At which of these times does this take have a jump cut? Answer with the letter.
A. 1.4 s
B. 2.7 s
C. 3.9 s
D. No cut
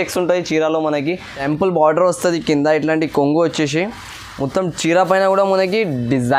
A